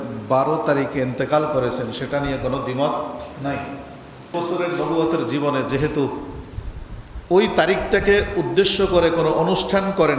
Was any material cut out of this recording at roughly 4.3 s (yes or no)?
yes